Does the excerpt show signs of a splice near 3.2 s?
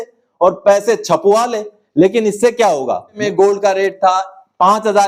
yes; 1 cut; at 3.2 s

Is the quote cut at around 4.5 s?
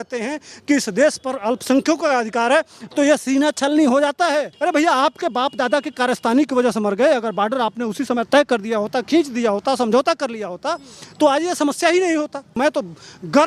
yes; 2 cuts; at 4.5 s, 12.6 s

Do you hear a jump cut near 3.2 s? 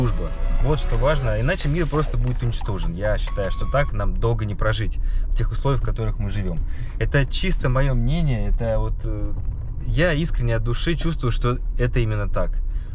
no; 0 cuts

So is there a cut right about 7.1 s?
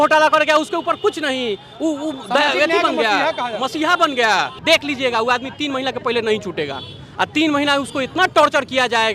no; 1 cut; at 4.6 s

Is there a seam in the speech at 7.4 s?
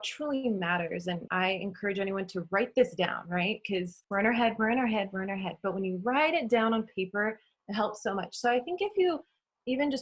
no; 2 cuts; at 1.2 s, 4.0 s

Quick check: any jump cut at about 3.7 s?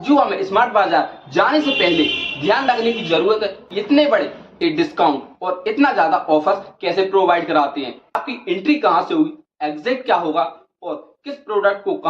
yes; 2 cuts; at 3.7 s, 8.2 s

